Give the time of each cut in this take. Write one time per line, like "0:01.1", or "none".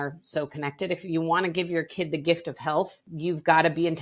0:03.0